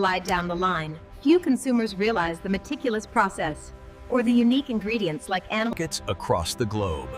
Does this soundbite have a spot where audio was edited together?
yes; 1 cut; at 5.7 s

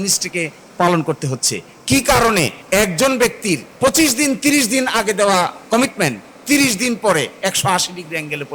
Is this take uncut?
no; 3 cuts; at 2.6 s, 3.7 s, 5.6 s

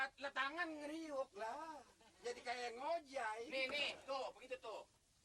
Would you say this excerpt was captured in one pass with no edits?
yes; 0 cuts

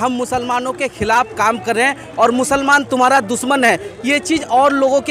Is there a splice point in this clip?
no; 0 cuts

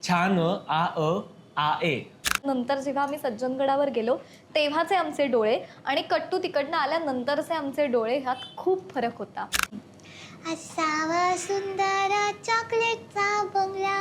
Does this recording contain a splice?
yes; 2 cuts; at 2.4 s, 9.8 s

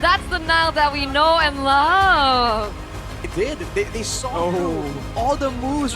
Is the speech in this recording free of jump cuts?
no; 1 cut; at 3.3 s

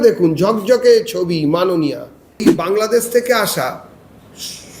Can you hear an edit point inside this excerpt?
yes; 1 cut; at 2.5 s

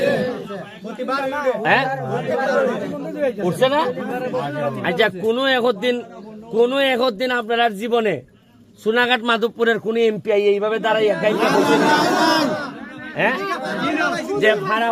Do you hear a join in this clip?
no; 0 cuts

